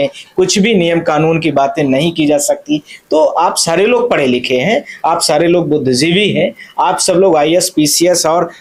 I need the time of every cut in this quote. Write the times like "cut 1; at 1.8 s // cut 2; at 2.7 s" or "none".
none

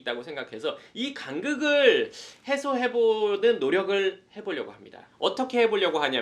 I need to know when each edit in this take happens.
cut 1; at 5.1 s

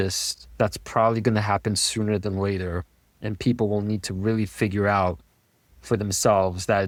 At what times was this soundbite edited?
none

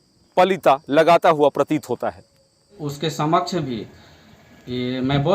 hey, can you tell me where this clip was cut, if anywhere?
cut 1; at 2.9 s

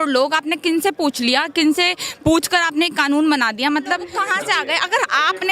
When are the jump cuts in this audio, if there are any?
cut 1; at 4.2 s

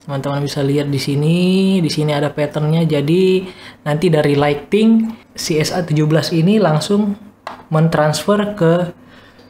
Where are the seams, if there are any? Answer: none

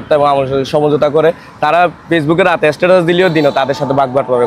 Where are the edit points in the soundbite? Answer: none

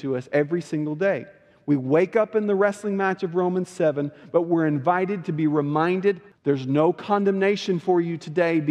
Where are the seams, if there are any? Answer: cut 1; at 6.3 s

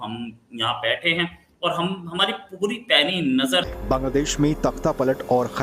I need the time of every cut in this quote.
cut 1; at 3.7 s

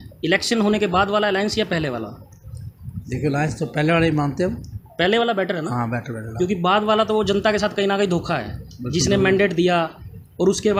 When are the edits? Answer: none

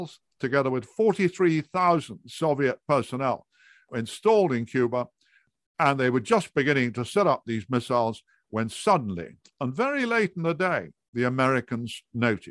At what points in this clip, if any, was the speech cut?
cut 1; at 3.9 s // cut 2; at 5.5 s

